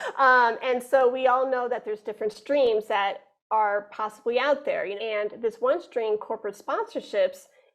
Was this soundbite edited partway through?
yes; 1 cut; at 4.9 s

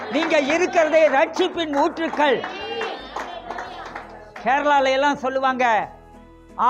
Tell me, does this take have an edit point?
no; 0 cuts

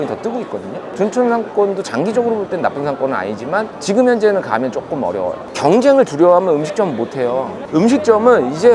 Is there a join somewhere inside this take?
yes; 2 cuts; at 0.9 s, 5.4 s

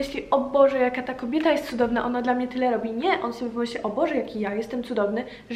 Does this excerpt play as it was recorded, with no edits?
yes; 0 cuts

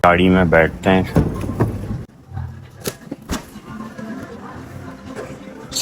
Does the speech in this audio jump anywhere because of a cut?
no; 0 cuts

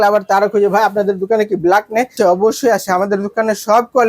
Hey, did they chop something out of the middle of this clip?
yes; 1 cut; at 2.1 s

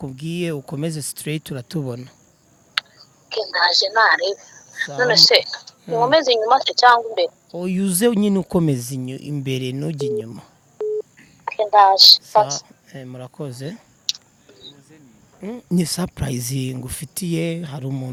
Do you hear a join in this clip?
no; 0 cuts

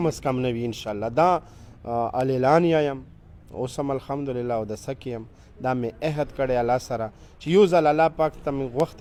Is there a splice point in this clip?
no; 0 cuts

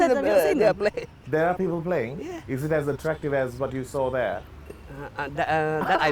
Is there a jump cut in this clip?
yes; 1 cut; at 1.1 s

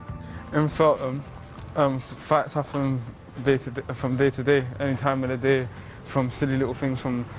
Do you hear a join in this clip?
yes; 1 cut; at 3.1 s

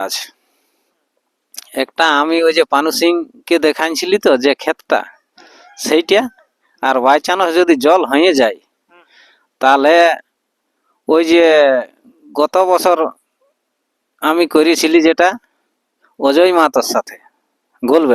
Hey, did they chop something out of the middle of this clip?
no; 0 cuts

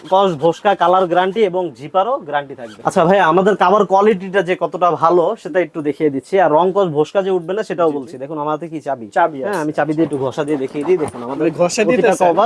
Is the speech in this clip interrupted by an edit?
yes; 1 cut; at 2.7 s

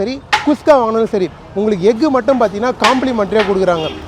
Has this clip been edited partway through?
no; 0 cuts

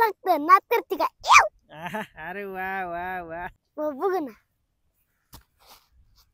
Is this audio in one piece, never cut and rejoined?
no; 1 cut; at 3.6 s

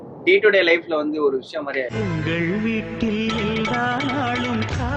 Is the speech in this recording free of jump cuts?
yes; 0 cuts

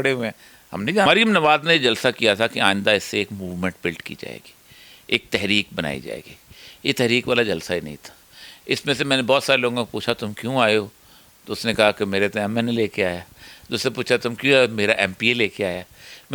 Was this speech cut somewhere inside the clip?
yes; 1 cut; at 1.1 s

